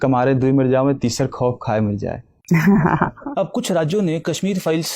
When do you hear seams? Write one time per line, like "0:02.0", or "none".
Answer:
0:03.2